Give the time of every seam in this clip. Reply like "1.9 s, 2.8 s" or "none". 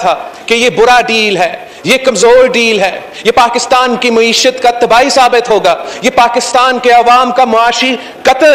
none